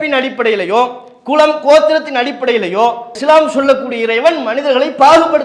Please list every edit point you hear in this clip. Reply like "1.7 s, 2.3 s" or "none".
none